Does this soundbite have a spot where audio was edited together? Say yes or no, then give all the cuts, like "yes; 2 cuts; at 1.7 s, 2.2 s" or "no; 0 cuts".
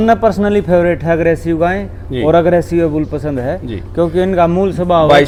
no; 0 cuts